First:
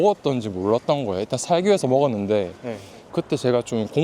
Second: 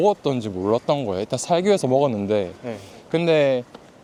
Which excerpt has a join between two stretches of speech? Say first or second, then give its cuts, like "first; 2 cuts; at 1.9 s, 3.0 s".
first; 1 cut; at 3.1 s